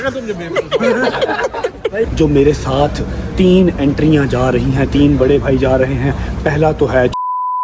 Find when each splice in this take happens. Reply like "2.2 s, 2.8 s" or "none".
2.1 s